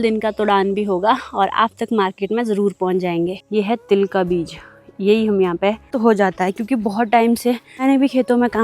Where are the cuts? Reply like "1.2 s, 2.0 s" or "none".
3.4 s, 6.0 s, 7.8 s